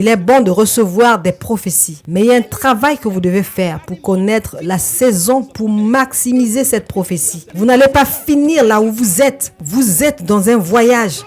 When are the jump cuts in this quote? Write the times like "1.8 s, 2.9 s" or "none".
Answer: 7.4 s